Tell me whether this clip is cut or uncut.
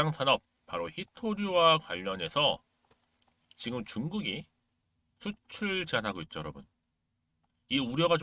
uncut